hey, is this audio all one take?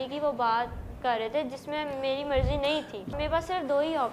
no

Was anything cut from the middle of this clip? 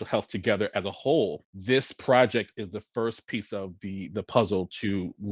yes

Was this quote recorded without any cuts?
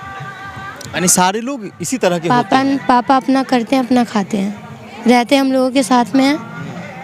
no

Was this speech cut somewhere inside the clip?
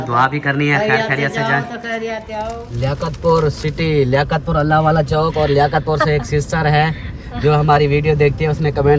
yes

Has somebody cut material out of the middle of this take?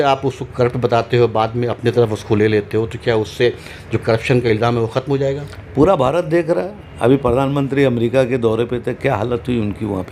no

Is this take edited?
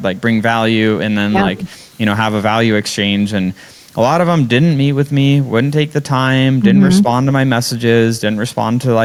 no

